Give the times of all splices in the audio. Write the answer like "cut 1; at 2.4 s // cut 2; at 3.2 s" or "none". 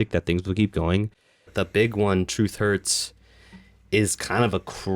cut 1; at 1.4 s

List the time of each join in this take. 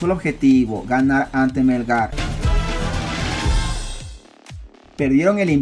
cut 1; at 2.1 s // cut 2; at 4.7 s

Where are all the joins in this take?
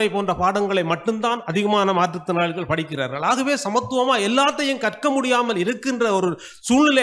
none

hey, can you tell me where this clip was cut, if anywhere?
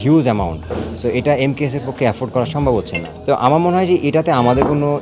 cut 1; at 3.0 s

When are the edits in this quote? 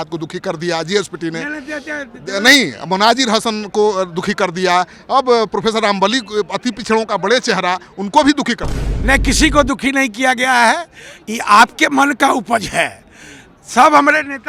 none

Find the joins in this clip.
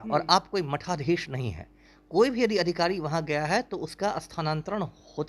none

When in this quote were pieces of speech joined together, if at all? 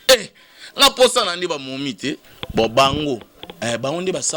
cut 1; at 2.3 s

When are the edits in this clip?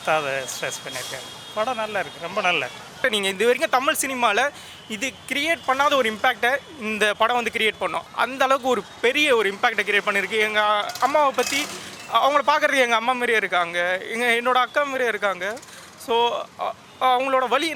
cut 1; at 3.0 s // cut 2; at 7.8 s

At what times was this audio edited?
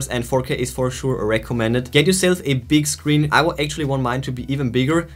none

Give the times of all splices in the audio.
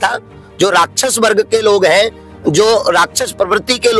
none

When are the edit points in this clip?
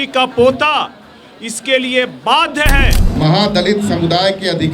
cut 1; at 3.0 s

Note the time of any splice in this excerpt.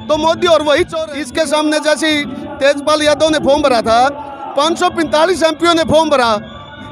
cut 1; at 0.9 s

